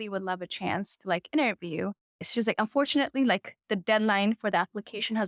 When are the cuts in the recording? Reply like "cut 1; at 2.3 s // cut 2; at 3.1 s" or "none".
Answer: cut 1; at 2.3 s